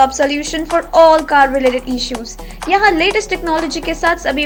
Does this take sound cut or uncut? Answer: uncut